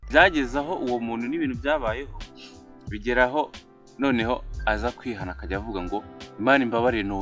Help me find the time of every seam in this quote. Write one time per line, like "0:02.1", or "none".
none